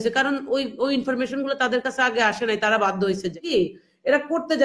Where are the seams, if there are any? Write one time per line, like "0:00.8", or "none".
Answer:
0:03.4